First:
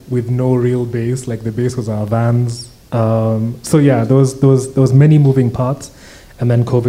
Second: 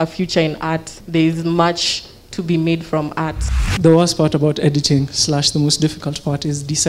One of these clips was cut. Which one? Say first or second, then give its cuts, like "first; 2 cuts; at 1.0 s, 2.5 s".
second; 2 cuts; at 0.9 s, 3.5 s